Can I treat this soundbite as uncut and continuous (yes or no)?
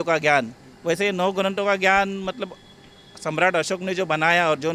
yes